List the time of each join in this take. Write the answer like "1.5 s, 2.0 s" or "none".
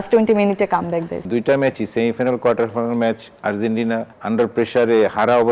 1.2 s, 4.1 s